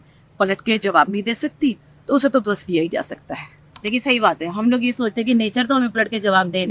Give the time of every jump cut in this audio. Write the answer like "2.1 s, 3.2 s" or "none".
3.9 s